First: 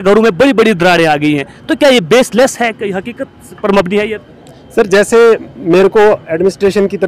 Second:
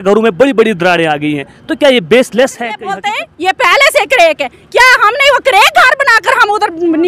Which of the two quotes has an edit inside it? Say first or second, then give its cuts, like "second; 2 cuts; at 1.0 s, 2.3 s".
second; 1 cut; at 2.9 s